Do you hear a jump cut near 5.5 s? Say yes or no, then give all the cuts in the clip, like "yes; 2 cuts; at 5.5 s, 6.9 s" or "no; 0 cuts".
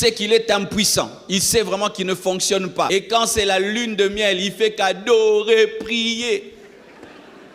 no; 1 cut; at 2.9 s